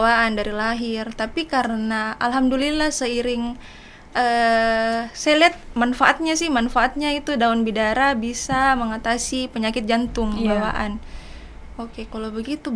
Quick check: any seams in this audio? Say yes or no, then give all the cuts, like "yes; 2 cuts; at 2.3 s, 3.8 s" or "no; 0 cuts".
no; 0 cuts